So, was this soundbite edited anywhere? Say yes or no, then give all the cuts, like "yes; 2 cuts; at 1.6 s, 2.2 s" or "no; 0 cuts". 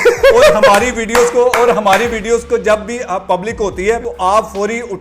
yes; 1 cut; at 4.1 s